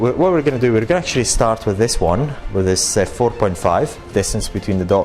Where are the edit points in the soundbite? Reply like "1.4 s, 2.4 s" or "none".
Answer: 4.1 s